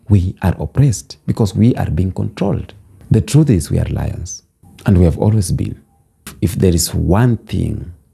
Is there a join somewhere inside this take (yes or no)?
yes